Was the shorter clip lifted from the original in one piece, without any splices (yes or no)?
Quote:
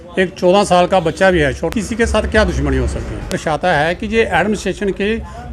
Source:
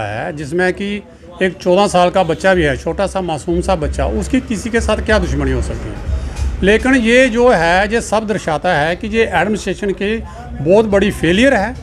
no